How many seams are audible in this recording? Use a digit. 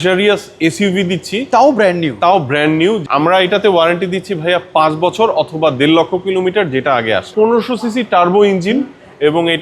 2